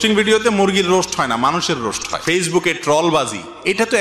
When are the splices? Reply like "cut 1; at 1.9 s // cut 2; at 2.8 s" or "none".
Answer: cut 1; at 2.1 s